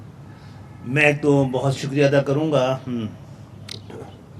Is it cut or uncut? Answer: cut